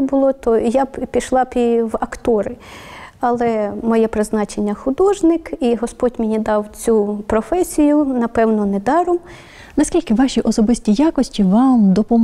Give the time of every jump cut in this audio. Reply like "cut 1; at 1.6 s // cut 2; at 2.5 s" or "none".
none

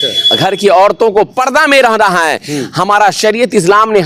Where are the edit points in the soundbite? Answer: none

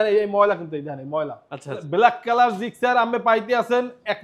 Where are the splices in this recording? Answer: cut 1; at 1.8 s

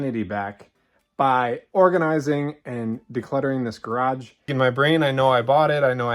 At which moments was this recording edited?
cut 1; at 4.5 s

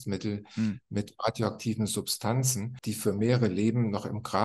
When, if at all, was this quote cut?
cut 1; at 2.7 s

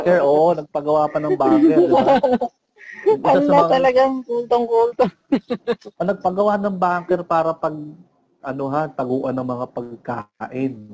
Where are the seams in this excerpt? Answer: none

